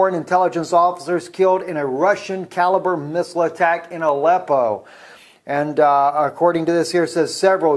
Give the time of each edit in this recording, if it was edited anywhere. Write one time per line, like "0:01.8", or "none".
0:03.0